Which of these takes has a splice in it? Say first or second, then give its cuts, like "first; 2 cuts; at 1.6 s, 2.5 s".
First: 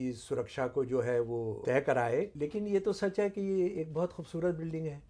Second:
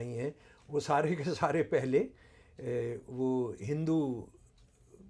first; 2 cuts; at 1.6 s, 2.3 s